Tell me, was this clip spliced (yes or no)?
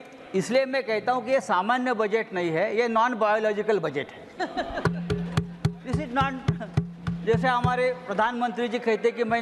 no